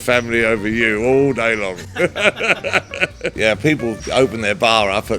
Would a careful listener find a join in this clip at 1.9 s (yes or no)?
no